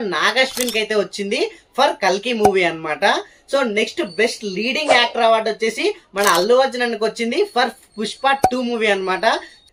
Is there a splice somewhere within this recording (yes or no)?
no